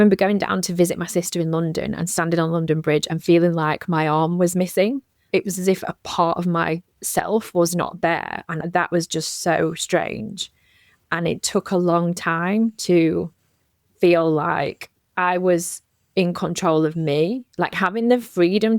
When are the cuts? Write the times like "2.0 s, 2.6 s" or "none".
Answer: 5.2 s